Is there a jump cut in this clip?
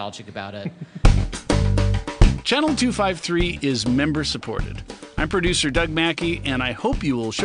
yes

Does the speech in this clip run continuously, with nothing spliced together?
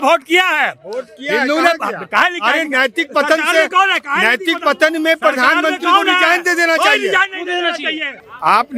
yes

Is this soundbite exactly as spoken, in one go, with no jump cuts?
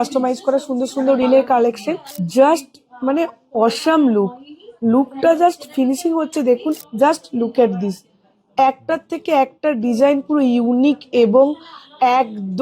no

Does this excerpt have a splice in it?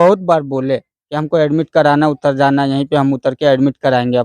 no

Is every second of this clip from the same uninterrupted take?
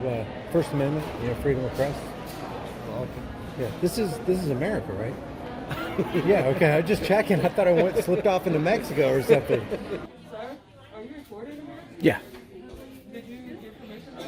no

